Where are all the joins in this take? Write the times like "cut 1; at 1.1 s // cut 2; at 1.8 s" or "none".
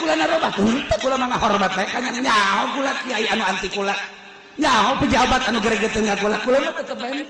none